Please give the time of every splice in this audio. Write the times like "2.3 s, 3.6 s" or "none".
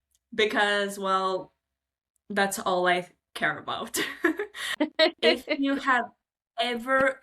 4.7 s